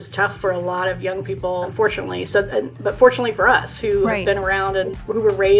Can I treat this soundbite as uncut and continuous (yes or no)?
no